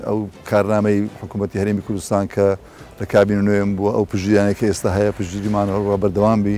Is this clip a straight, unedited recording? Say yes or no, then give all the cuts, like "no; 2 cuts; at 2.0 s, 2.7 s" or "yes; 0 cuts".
yes; 0 cuts